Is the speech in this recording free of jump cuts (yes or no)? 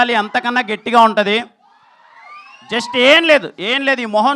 yes